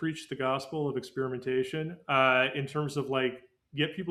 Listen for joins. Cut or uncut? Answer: uncut